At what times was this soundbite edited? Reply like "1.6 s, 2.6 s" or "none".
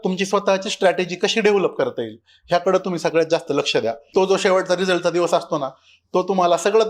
4.1 s